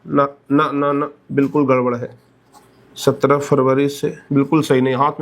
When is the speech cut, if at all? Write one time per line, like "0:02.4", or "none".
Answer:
none